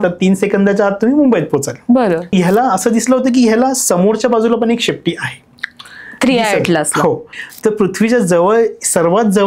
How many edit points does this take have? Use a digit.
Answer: 2